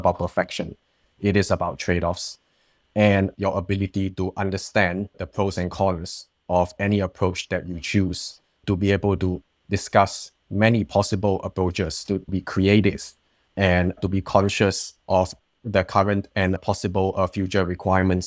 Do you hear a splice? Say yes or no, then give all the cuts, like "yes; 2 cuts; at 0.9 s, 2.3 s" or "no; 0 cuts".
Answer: yes; 2 cuts; at 3.3 s, 5.1 s